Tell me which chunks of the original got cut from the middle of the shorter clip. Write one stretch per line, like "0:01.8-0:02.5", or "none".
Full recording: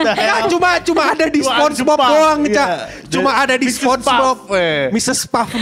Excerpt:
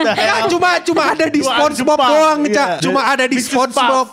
0:02.8-0:03.1